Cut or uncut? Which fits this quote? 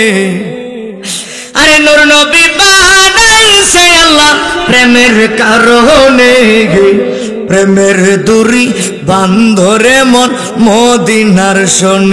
uncut